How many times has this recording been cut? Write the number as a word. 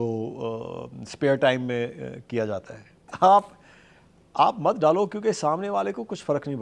one